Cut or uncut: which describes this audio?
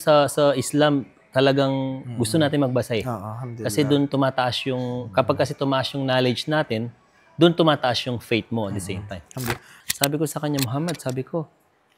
cut